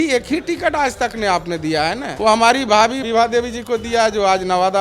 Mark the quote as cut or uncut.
cut